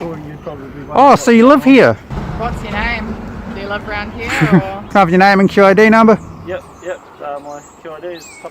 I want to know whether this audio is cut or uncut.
cut